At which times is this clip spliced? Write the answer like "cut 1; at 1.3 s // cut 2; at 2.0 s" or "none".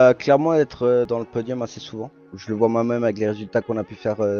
cut 1; at 1.1 s // cut 2; at 2.2 s